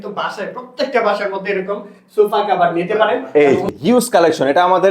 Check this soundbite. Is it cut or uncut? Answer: cut